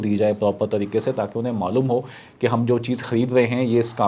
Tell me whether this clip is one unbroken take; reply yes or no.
yes